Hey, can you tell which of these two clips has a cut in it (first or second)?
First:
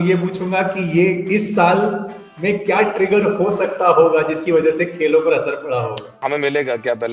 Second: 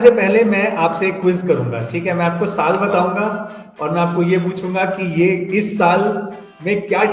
first